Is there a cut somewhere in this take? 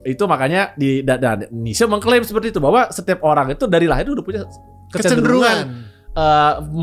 no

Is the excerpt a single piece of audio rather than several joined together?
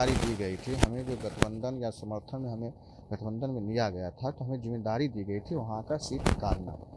yes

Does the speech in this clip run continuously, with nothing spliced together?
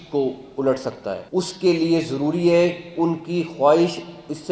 no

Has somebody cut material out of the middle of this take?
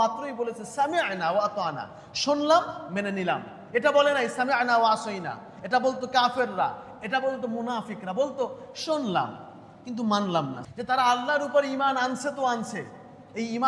yes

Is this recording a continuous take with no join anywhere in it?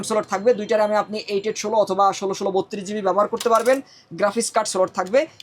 yes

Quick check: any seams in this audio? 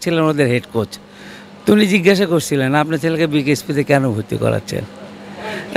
no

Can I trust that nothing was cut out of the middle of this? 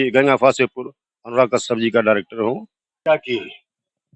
no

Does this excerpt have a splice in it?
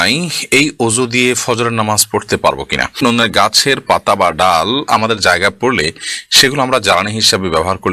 yes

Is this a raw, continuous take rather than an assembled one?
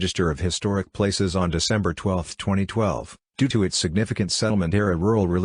no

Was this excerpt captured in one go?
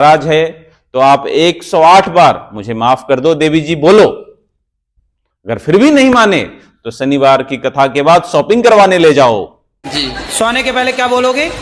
no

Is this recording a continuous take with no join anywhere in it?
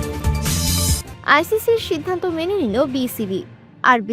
yes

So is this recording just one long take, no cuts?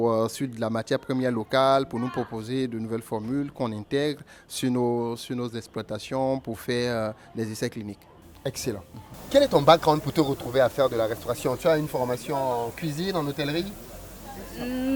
no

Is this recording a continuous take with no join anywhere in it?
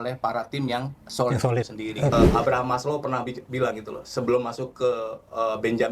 no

